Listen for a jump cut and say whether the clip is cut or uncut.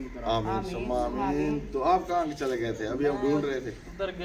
uncut